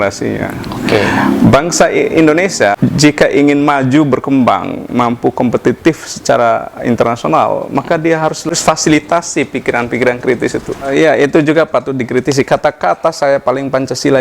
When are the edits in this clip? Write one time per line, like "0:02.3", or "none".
0:02.8
0:08.5
0:10.7